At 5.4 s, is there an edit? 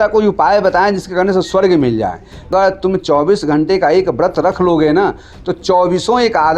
no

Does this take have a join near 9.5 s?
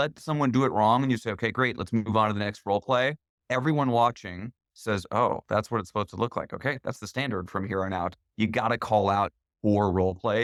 no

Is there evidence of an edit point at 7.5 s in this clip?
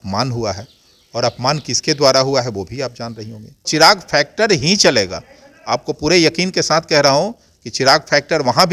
no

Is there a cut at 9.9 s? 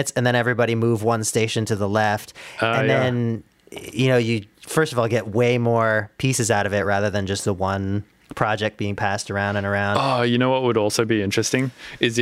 yes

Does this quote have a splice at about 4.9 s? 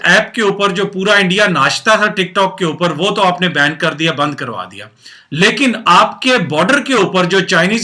no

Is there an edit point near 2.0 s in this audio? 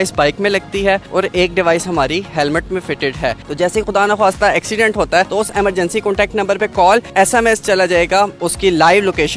no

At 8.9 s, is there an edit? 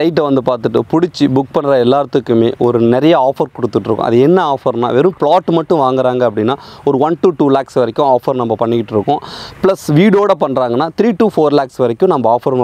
no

